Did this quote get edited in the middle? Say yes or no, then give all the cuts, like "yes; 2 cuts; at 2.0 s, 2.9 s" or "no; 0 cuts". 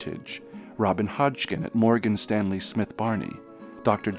no; 0 cuts